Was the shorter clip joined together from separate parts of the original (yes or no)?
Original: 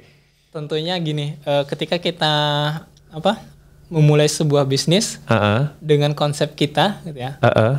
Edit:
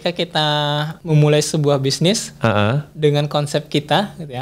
yes